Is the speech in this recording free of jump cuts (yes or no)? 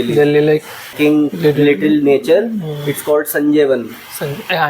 no